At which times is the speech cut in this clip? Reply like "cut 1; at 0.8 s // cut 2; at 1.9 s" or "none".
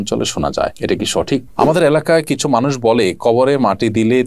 cut 1; at 1.5 s